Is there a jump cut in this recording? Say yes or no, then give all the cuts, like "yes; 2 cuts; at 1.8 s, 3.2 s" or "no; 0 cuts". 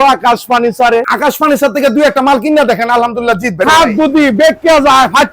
yes; 2 cuts; at 1.1 s, 3.6 s